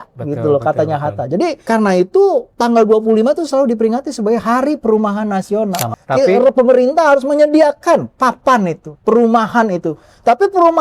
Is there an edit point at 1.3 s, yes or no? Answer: no